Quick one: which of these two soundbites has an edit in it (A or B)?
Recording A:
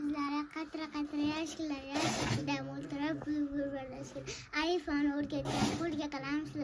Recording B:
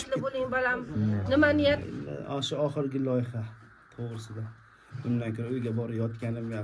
B